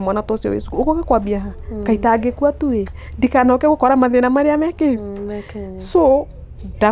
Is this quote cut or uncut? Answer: uncut